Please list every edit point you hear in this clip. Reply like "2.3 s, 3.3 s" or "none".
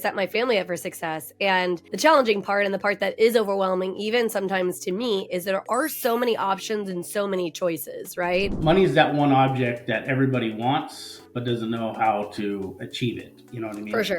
8.6 s

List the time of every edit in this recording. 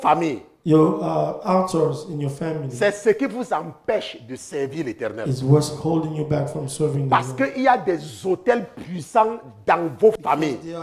none

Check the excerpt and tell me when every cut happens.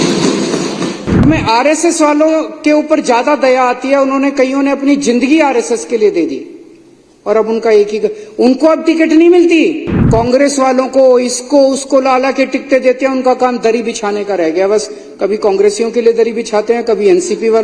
1.2 s, 9.9 s

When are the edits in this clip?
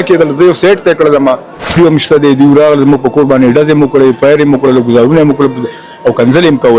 1.8 s

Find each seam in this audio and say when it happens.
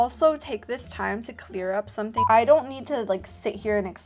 2.2 s

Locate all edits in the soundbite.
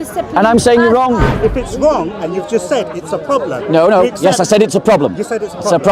1.3 s

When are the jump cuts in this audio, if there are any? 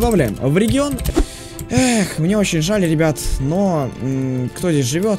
1.0 s

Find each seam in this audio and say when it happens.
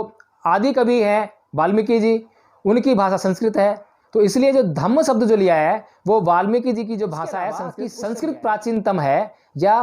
7.8 s

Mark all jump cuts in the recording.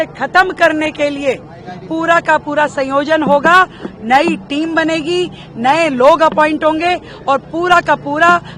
none

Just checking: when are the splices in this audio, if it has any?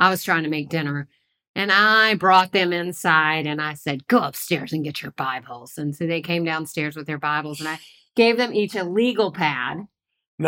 none

